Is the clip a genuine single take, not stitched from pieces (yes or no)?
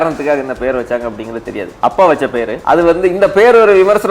no